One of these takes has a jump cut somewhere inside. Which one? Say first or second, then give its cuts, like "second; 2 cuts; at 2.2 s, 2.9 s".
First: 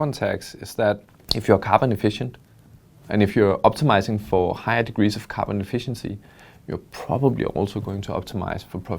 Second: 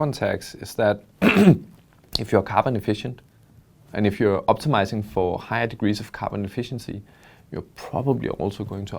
first; 1 cut; at 1.1 s